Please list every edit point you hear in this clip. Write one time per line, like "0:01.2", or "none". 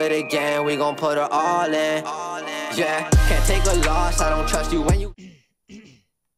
0:05.1